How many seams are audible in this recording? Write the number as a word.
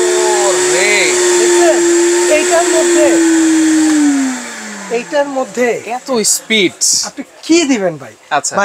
zero